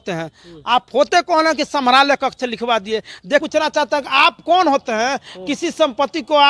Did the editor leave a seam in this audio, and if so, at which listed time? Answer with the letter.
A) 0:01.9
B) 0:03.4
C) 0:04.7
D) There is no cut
B